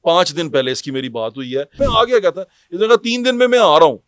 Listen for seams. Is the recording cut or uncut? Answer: cut